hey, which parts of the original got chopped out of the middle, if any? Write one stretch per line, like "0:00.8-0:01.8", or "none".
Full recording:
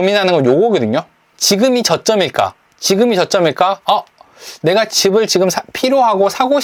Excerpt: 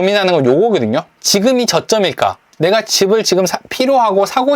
0:01.2-0:01.3
0:02.6-0:04.5